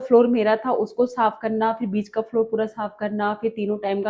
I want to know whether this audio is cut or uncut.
uncut